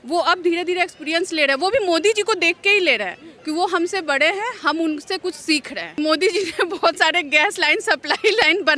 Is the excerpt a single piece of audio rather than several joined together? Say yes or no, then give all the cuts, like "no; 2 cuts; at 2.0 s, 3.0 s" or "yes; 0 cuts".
no; 1 cut; at 6.0 s